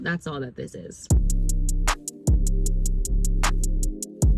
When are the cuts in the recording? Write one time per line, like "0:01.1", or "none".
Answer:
0:01.1